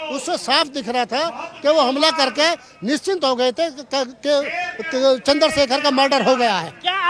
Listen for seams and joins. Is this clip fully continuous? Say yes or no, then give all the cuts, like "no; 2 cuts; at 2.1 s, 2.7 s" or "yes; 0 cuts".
yes; 0 cuts